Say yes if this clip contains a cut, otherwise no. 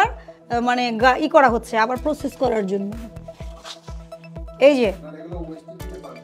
no